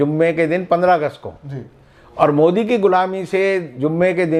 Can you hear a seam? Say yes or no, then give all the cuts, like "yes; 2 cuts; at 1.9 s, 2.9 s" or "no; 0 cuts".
no; 0 cuts